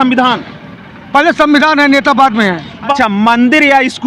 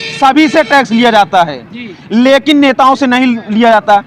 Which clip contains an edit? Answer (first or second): first